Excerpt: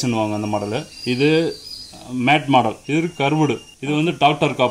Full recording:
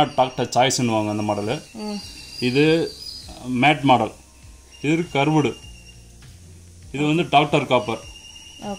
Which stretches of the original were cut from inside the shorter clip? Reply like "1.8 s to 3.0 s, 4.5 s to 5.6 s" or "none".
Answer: 1.7 s to 2.3 s, 4.2 s to 4.8 s, 5.7 s to 6.8 s